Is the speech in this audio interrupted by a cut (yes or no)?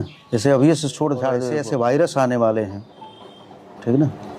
yes